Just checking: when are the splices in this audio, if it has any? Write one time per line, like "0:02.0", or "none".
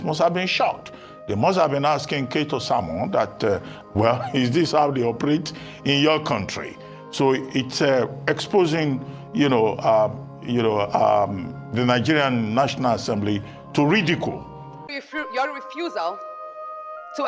0:14.9